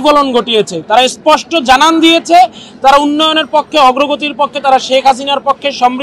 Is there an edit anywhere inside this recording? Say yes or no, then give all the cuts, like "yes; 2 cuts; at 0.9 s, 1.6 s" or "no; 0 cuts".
no; 0 cuts